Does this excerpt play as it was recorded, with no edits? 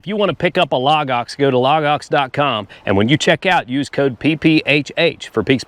yes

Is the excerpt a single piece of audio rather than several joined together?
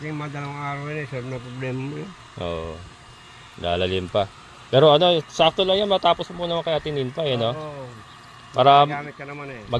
yes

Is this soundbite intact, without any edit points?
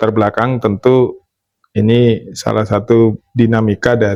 yes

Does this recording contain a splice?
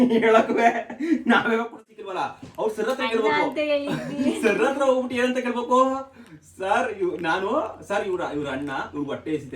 yes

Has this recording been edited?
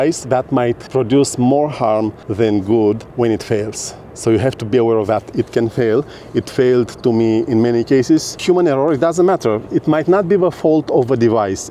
yes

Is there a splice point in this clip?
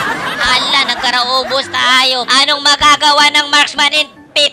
yes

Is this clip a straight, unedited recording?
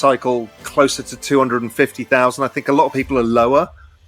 yes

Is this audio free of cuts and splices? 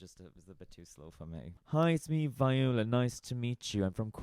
no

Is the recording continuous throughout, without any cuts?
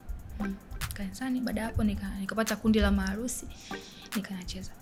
yes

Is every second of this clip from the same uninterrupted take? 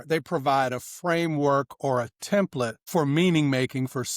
no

